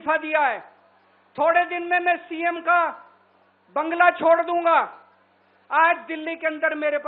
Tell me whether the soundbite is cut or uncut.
uncut